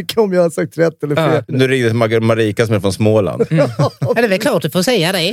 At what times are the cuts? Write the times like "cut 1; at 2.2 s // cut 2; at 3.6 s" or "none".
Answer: cut 1; at 1.5 s